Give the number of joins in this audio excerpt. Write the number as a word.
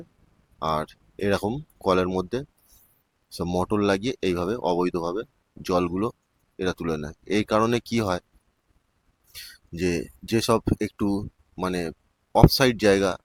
zero